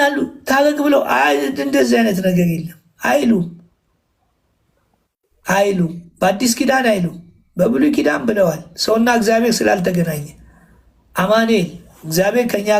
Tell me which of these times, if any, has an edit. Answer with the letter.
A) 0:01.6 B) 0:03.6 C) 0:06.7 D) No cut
D